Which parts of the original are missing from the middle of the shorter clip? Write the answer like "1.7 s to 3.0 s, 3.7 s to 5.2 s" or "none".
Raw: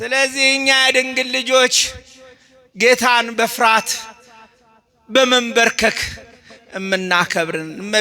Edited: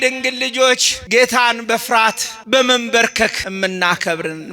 1.9 s to 2.6 s, 4.0 s to 4.9 s, 6.1 s to 6.7 s